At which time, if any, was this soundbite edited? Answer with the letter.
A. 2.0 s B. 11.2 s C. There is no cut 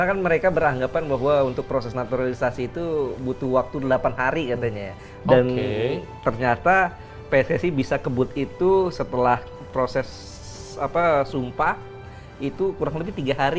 C